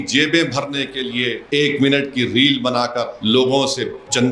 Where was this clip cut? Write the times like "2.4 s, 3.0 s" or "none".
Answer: 1.4 s, 3.1 s